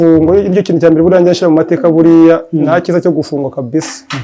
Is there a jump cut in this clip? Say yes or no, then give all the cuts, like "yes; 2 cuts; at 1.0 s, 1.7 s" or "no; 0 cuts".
no; 0 cuts